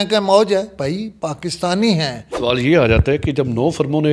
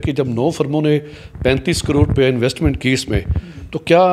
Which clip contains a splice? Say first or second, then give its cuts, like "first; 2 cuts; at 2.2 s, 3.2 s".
first; 1 cut; at 2.2 s